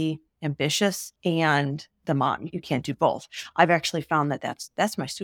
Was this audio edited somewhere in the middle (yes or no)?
yes